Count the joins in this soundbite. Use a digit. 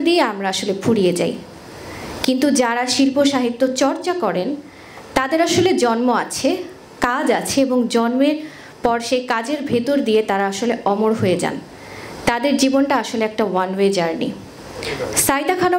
0